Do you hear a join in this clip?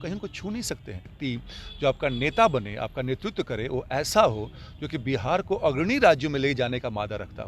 yes; 1 cut; at 1.2 s

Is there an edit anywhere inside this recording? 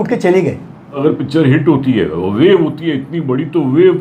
yes; 1 cut; at 1.0 s

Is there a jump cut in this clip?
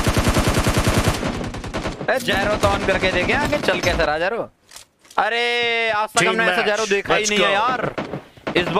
no; 0 cuts

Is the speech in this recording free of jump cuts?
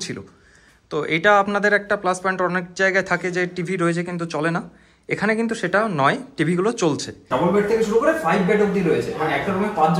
no; 1 cut; at 7.2 s

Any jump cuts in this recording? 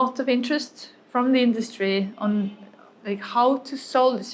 no; 0 cuts

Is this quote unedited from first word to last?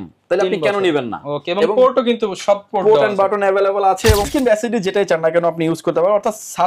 no; 1 cut; at 4.3 s

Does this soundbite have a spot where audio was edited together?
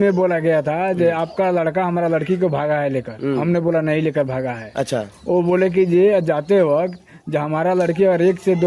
no; 0 cuts

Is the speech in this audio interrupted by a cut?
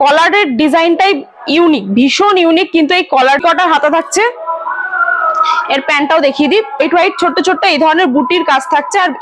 yes; 2 cuts; at 3.4 s, 6.8 s

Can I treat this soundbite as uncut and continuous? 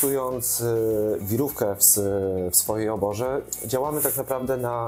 yes; 0 cuts

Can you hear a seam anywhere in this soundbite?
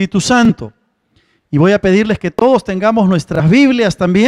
no; 0 cuts

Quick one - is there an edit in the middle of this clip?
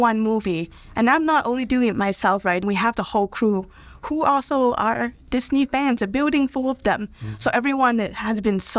yes; 1 cut; at 2.6 s

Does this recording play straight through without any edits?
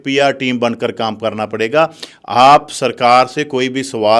yes; 0 cuts

